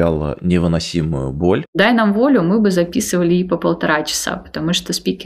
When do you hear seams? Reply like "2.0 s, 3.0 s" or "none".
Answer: 1.7 s

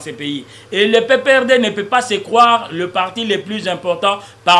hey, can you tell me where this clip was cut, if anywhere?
none

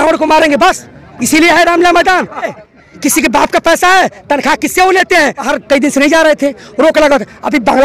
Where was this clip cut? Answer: 2.5 s, 5.5 s

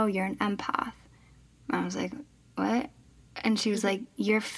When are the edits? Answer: none

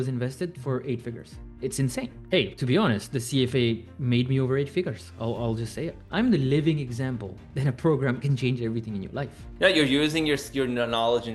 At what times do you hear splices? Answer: 2.2 s, 6.0 s, 9.4 s

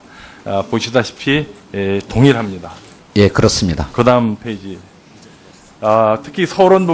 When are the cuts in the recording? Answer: none

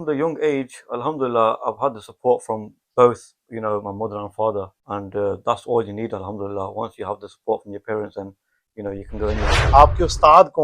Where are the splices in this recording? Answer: 4.8 s, 9.6 s

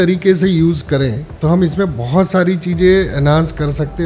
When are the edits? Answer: 1.2 s

